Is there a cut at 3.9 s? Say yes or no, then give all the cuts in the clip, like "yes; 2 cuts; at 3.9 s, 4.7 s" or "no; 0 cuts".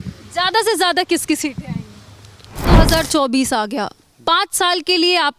no; 1 cut; at 2.6 s